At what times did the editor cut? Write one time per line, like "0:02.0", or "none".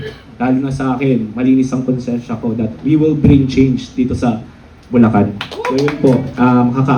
0:05.8